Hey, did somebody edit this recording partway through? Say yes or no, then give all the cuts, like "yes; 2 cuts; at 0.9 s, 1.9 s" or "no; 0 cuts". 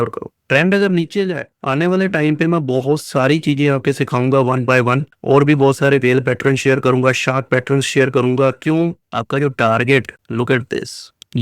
yes; 2 cuts; at 1.5 s, 9.0 s